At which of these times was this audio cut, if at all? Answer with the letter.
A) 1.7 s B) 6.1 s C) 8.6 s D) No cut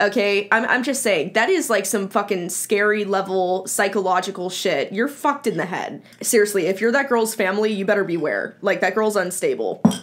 B